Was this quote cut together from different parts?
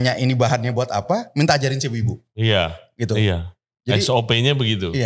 no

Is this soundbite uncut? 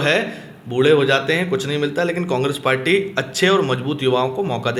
yes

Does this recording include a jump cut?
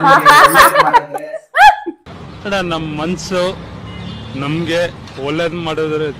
no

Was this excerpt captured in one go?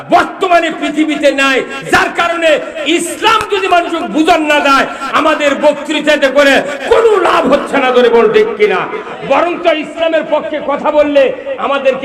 yes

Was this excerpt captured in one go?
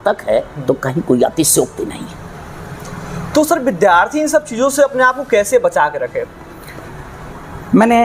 yes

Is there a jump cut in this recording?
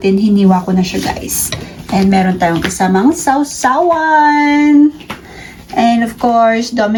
no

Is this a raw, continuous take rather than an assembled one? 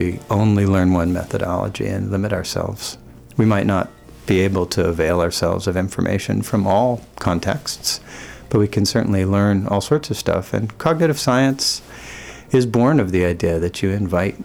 yes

